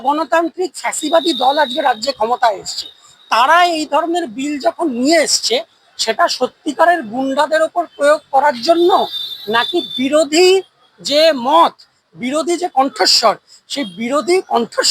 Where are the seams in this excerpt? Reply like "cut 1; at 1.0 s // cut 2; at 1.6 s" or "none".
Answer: none